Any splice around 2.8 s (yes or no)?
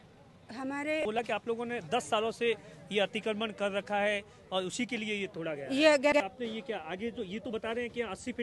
no